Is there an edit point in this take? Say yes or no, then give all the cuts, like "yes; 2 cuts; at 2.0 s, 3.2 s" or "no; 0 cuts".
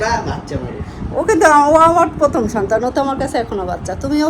no; 0 cuts